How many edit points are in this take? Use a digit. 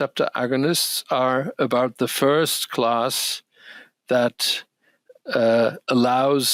0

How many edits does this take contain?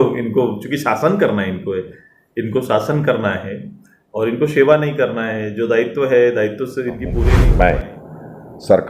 1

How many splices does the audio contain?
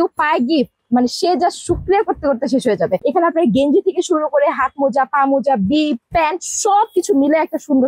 0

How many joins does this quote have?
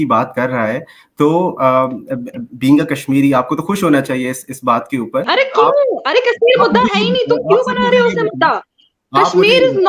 1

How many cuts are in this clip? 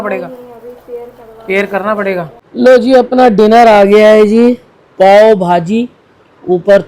1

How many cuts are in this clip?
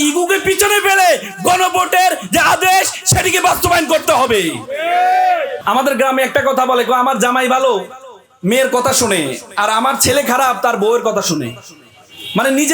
1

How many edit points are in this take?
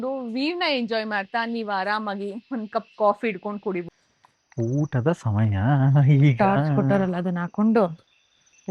1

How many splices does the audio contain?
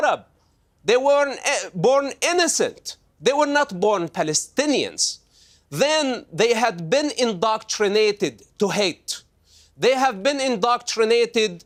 0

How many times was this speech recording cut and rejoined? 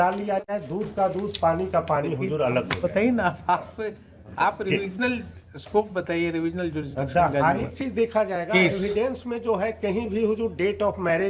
1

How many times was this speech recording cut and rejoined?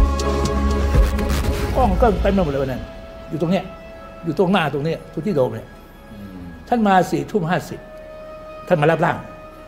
0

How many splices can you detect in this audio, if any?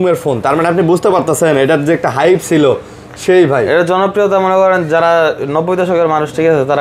0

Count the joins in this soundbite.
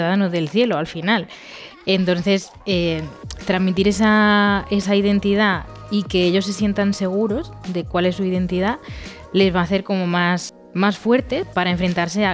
2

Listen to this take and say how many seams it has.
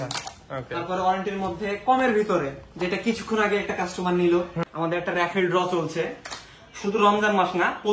1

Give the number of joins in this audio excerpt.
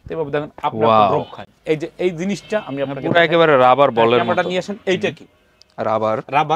0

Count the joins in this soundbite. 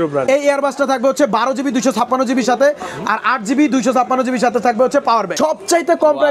1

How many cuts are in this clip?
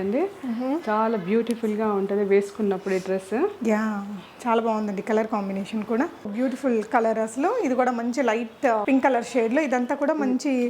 2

